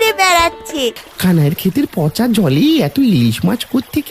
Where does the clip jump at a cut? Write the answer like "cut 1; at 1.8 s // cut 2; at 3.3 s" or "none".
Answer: cut 1; at 1.0 s